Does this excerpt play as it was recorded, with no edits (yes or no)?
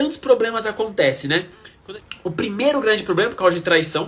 no